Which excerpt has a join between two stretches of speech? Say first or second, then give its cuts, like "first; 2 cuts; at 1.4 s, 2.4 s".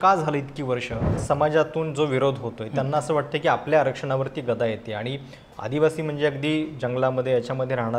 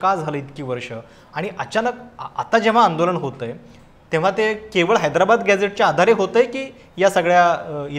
first; 1 cut; at 1.1 s